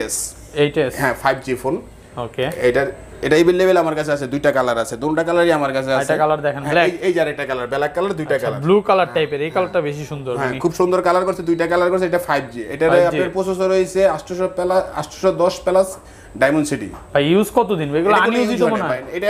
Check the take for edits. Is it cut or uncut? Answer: uncut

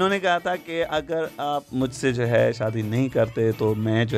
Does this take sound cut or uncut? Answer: uncut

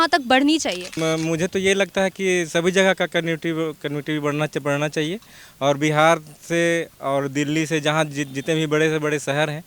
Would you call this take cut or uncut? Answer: cut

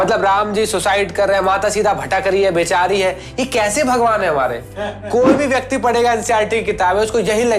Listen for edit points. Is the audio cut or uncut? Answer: uncut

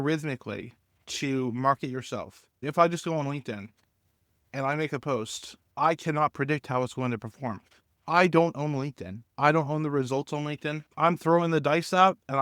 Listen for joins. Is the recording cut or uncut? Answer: cut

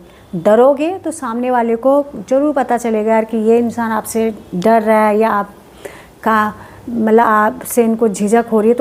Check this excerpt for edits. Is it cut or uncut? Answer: uncut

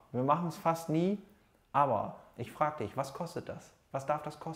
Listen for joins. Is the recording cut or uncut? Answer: uncut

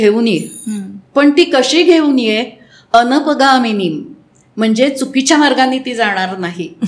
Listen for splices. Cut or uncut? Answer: uncut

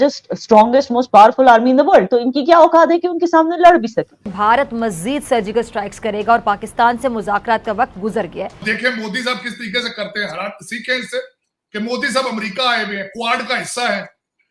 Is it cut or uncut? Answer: cut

